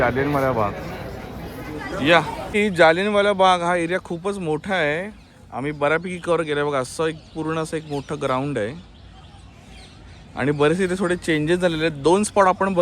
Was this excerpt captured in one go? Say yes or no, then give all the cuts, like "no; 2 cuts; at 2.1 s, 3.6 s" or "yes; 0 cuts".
no; 1 cut; at 2.5 s